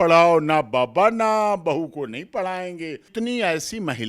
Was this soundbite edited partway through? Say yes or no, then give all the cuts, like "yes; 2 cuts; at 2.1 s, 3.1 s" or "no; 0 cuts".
yes; 1 cut; at 3.1 s